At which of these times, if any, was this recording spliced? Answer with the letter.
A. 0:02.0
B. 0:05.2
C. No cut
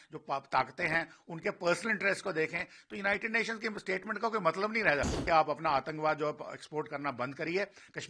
B